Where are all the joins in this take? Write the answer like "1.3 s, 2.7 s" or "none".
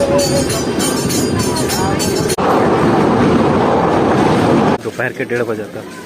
2.4 s, 4.8 s